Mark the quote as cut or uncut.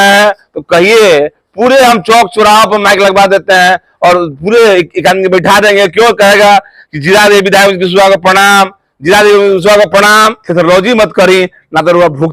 cut